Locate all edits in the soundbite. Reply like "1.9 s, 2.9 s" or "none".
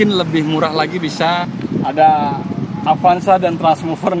1.5 s